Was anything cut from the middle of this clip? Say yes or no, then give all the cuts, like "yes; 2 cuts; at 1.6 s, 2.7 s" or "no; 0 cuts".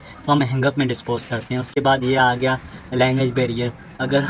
no; 0 cuts